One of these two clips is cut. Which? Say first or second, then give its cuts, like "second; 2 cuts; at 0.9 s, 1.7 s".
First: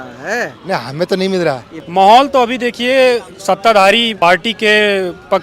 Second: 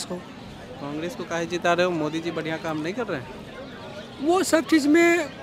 first; 2 cuts; at 1.7 s, 4.1 s